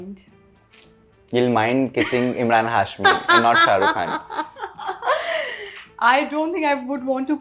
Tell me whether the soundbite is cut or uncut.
uncut